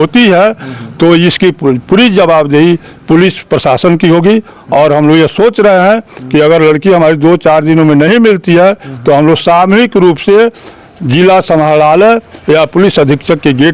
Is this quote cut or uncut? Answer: uncut